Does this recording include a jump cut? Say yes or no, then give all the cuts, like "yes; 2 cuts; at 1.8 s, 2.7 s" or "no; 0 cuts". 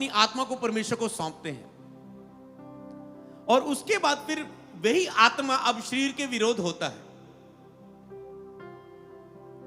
no; 0 cuts